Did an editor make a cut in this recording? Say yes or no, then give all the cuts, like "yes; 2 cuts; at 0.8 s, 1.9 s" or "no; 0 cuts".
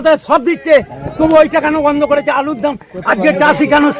no; 0 cuts